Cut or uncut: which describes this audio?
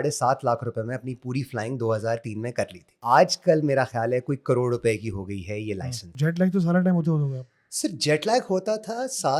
cut